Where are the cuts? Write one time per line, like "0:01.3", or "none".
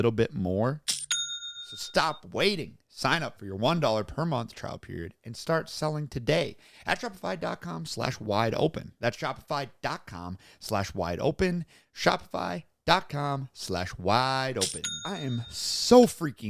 0:15.0